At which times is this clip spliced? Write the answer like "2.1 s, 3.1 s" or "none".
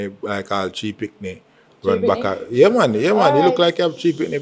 none